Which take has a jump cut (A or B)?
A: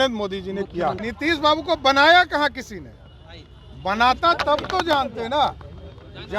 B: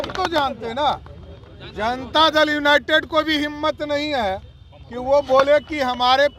A